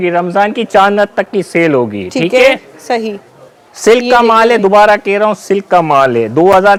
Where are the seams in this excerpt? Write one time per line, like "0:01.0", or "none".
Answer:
none

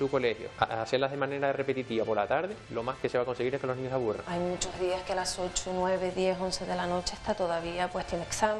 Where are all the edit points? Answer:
0:04.2

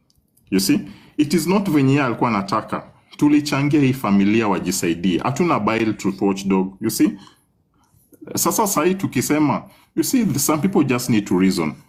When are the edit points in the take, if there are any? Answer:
none

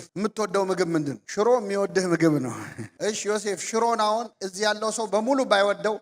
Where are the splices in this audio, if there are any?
0:02.9

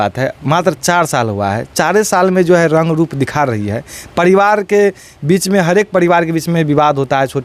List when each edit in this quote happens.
none

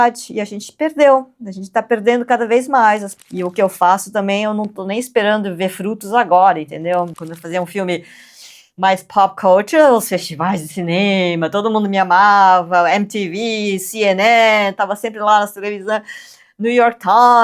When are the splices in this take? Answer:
0:03.2
0:07.1

